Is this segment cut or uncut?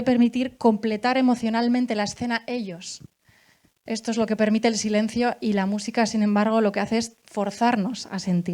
uncut